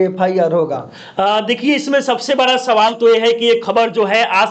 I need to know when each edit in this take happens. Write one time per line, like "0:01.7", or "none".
none